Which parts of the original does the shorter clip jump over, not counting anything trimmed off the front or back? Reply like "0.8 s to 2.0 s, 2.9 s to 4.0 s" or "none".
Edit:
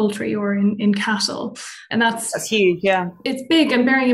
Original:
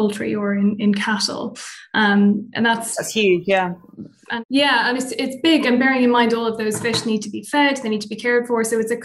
1.8 s to 2.5 s, 3.8 s to 5.1 s